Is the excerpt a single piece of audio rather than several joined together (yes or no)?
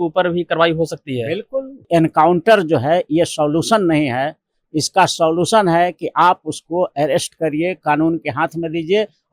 no